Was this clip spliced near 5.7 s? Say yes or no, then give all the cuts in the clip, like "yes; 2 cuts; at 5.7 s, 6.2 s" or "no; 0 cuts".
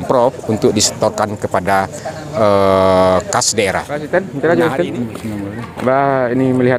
no; 1 cut; at 4.0 s